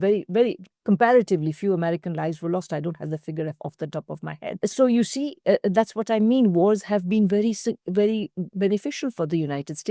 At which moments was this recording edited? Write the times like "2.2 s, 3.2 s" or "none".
4.6 s